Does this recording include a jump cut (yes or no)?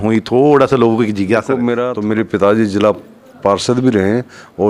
yes